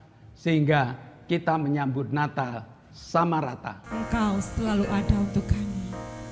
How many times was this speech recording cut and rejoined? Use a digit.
1